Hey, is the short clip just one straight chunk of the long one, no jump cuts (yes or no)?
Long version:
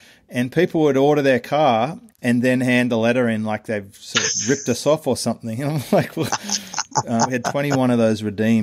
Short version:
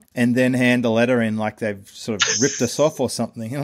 yes